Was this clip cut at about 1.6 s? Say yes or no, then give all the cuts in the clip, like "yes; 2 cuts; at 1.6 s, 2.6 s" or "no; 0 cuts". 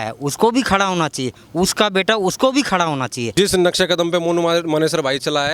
no; 1 cut; at 3.3 s